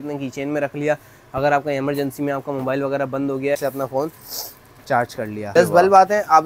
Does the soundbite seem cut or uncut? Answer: cut